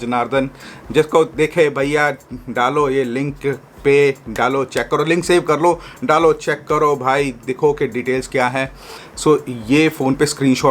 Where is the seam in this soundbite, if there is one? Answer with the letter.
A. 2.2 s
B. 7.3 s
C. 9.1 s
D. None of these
C